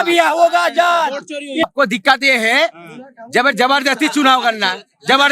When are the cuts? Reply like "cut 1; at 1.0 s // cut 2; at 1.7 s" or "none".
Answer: cut 1; at 1.6 s